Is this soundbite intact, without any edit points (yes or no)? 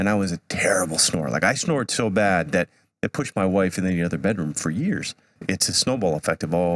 no